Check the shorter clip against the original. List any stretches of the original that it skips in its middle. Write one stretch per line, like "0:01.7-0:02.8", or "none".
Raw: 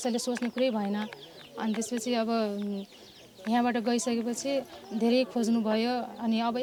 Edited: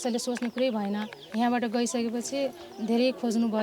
0:01.2-0:03.3